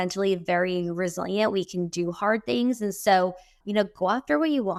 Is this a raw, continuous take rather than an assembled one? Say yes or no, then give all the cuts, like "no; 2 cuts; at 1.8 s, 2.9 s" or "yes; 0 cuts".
yes; 0 cuts